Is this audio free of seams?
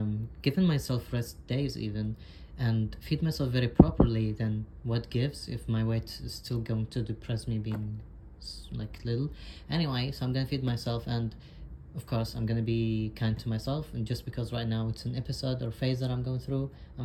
yes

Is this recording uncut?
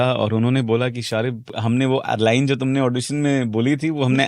no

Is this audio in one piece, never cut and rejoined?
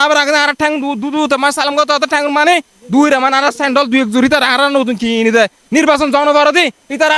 yes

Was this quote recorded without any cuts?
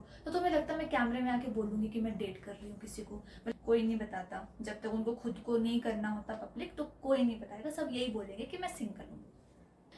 yes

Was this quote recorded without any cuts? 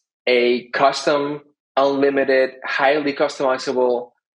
yes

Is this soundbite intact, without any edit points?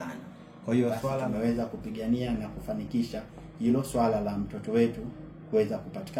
no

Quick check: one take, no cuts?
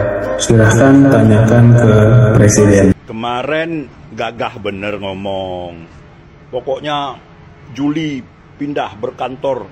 no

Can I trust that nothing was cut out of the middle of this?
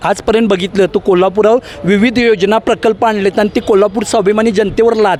yes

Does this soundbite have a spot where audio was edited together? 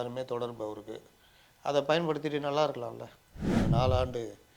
yes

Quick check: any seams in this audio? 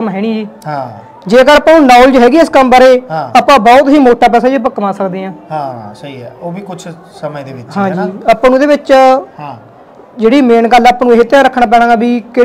no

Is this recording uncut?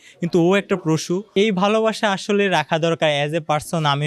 no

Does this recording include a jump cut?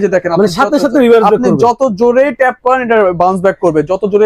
no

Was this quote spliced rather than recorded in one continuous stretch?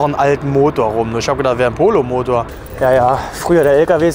yes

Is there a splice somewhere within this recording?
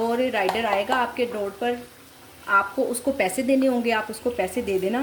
no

